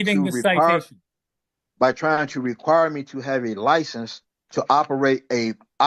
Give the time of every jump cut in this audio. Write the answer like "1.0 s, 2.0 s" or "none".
none